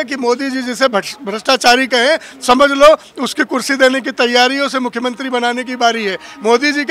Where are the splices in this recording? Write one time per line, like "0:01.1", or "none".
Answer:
none